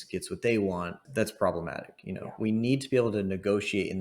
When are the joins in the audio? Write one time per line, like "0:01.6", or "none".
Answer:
0:01.0